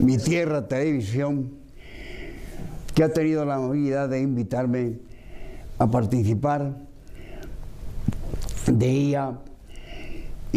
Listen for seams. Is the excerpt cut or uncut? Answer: uncut